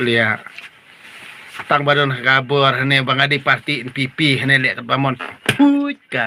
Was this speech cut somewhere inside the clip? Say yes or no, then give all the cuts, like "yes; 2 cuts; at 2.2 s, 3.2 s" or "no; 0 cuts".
no; 0 cuts